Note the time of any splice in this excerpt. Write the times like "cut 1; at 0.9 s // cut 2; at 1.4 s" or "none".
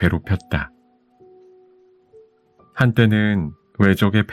cut 1; at 0.7 s // cut 2; at 2.7 s

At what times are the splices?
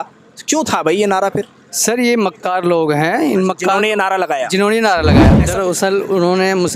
cut 1; at 5.4 s

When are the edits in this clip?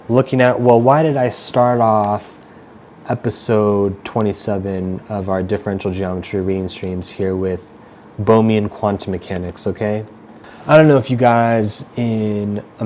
none

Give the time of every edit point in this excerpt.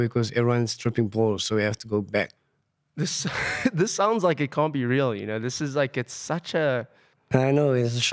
cut 1; at 2.4 s // cut 2; at 7.1 s

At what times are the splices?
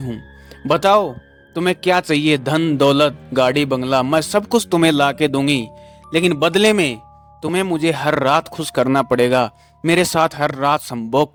none

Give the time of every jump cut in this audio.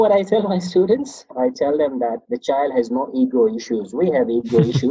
cut 1; at 1.2 s // cut 2; at 2.3 s

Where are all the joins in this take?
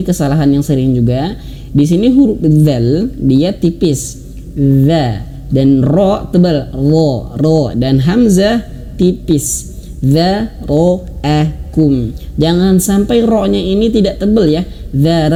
none

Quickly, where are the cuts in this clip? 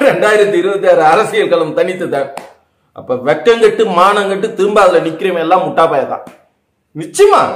none

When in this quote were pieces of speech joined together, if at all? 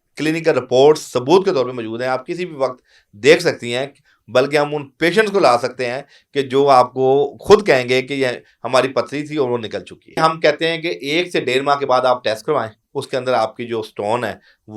cut 1; at 10.2 s

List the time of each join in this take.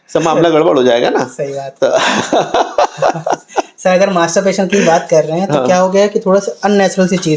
none

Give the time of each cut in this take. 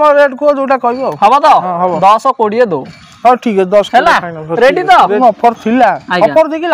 cut 1; at 5.2 s

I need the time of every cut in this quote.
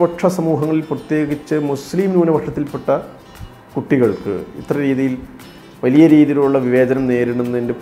none

